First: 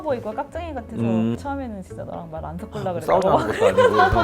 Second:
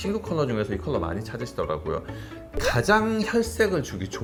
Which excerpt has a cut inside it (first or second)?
first